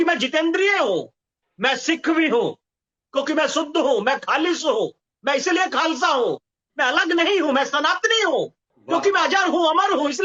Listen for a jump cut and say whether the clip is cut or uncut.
uncut